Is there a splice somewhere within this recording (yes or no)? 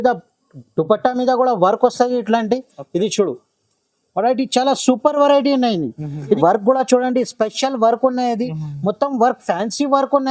yes